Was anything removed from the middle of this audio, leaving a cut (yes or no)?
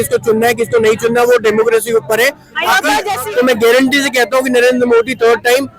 yes